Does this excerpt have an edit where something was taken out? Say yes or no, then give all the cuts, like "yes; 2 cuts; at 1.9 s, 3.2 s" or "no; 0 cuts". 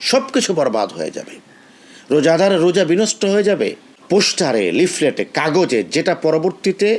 yes; 1 cut; at 3.9 s